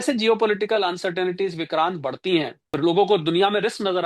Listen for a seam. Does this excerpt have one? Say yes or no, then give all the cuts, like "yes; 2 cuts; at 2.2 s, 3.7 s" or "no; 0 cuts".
yes; 1 cut; at 2.7 s